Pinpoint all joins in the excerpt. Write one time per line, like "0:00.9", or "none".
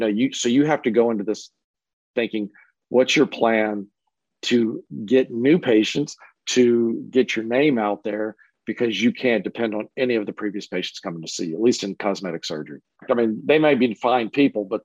0:13.0